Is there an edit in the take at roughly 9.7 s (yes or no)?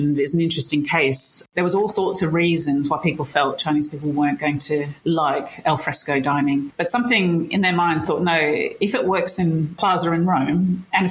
yes